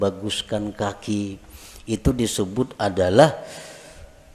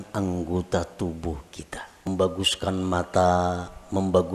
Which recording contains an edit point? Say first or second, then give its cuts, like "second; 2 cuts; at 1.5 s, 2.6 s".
second; 1 cut; at 2.1 s